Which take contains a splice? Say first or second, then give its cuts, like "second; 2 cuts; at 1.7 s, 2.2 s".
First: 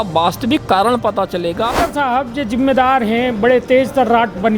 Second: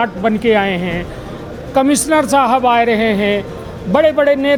first; 1 cut; at 1.7 s